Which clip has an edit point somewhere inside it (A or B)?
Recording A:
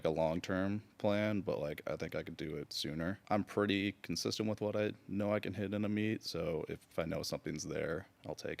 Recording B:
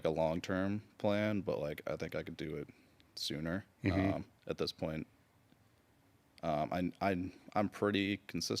A